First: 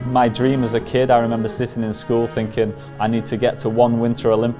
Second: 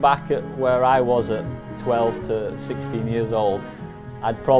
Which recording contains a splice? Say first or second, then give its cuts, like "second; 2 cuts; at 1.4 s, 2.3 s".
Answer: first; 1 cut; at 2.8 s